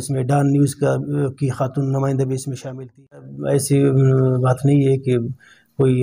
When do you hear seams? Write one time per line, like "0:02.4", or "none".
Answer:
0:03.3

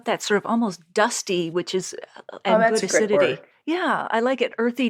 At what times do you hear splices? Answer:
none

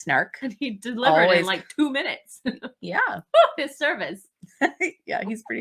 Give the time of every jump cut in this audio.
none

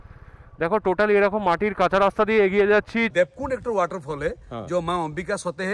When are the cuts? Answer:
0:03.1

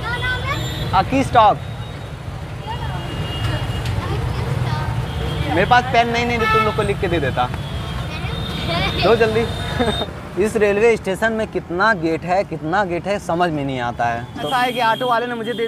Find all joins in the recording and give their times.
0:10.1
0:14.5

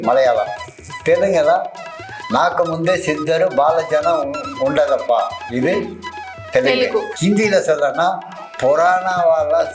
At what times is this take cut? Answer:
0:07.1

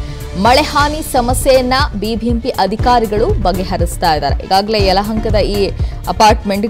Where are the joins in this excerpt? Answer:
0:04.7

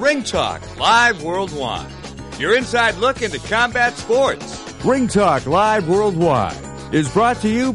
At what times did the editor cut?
0:04.7

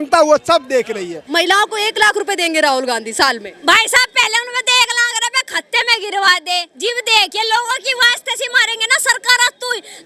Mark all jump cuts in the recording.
0:01.2

